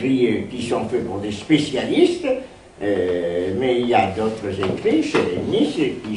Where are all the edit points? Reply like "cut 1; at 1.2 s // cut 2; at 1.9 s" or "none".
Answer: none